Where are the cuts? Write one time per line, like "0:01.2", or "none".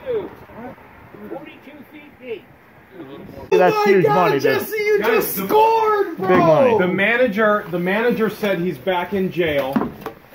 0:03.5